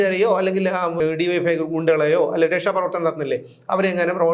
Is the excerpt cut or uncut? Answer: cut